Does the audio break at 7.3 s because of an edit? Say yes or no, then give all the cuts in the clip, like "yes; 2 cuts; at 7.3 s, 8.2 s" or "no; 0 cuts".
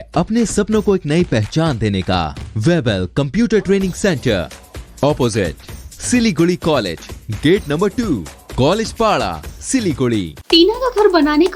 no; 2 cuts; at 2.4 s, 10.4 s